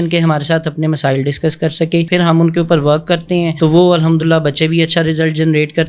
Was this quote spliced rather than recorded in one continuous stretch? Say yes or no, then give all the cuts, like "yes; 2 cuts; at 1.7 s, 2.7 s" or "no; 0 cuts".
yes; 1 cut; at 2.1 s